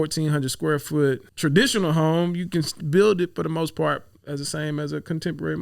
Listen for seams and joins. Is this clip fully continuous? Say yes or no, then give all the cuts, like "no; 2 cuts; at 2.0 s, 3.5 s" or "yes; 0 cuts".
no; 1 cut; at 1.3 s